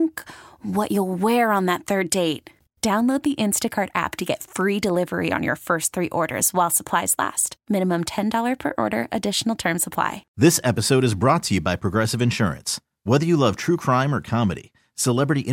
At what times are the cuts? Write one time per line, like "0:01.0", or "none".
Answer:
0:10.2